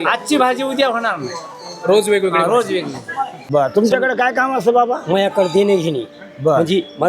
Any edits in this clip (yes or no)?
yes